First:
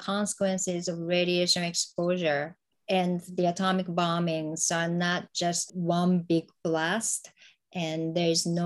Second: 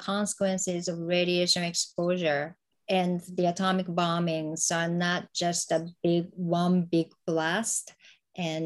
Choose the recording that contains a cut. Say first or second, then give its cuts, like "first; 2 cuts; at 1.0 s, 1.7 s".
first; 1 cut; at 5.6 s